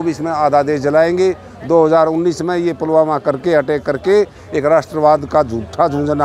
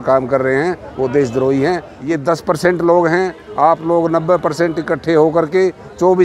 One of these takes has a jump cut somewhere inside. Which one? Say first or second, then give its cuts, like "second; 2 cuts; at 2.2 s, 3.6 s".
second; 1 cut; at 1.9 s